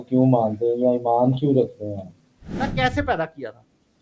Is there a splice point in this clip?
yes; 1 cut; at 2.7 s

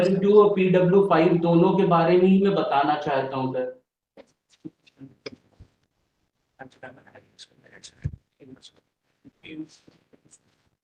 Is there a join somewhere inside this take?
no; 0 cuts

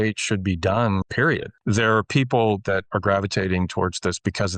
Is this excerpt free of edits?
no; 2 cuts; at 1.1 s, 2.9 s

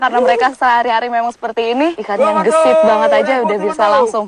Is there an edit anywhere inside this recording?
yes; 1 cut; at 2.0 s

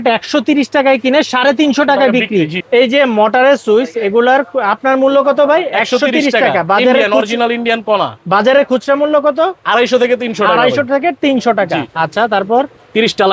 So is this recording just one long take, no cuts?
yes; 0 cuts

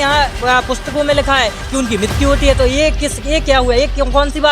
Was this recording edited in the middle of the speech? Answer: no; 0 cuts

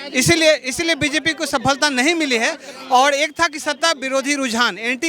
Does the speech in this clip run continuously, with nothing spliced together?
yes; 0 cuts

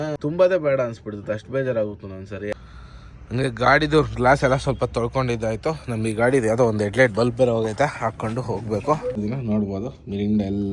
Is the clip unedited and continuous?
no; 2 cuts; at 2.5 s, 9.2 s

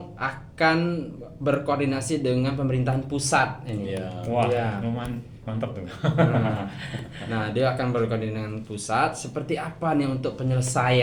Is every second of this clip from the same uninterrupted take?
yes; 0 cuts

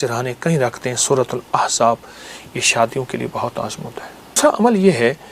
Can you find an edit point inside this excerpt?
yes; 1 cut; at 4.4 s

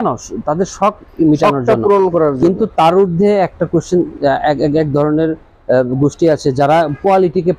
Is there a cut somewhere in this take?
no; 0 cuts

